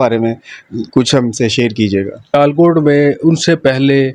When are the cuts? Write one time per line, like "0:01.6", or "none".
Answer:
0:02.2